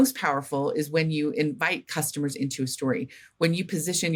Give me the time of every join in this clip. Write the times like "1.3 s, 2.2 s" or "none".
none